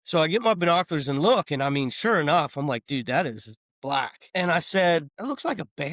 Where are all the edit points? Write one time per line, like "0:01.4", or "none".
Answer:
0:04.2
0:05.1